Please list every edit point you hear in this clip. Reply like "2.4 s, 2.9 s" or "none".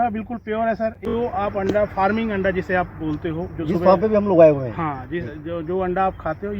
1.1 s

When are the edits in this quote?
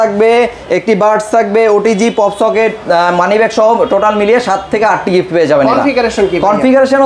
none

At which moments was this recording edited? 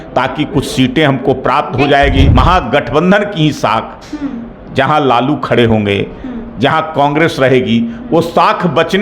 2.3 s

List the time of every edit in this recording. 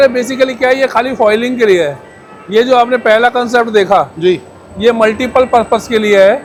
none

